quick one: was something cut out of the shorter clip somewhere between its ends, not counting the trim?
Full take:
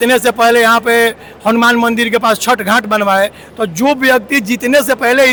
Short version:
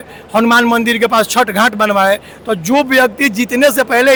no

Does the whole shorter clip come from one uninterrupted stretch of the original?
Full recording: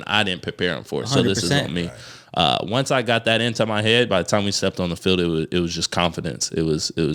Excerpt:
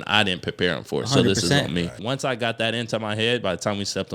no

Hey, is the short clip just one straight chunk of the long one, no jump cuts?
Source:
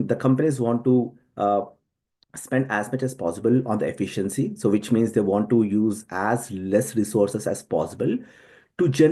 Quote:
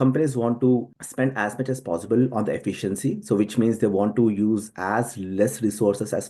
no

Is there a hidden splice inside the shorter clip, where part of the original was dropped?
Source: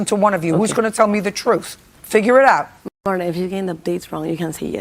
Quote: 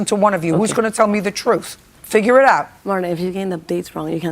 yes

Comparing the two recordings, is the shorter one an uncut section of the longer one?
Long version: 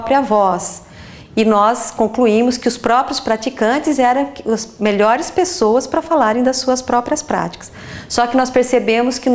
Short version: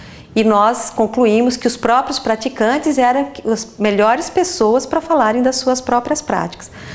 yes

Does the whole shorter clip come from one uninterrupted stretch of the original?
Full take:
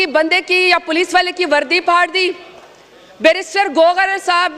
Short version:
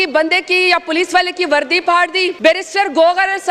no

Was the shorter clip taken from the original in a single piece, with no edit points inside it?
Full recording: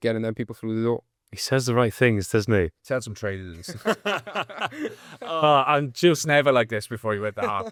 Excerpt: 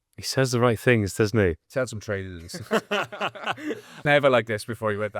no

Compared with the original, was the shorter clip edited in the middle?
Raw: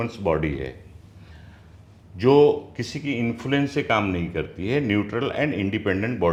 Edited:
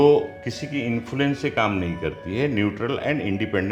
no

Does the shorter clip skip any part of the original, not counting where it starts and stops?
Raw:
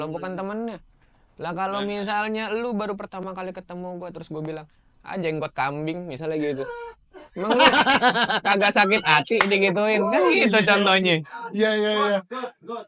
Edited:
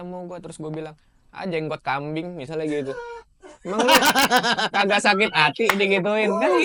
no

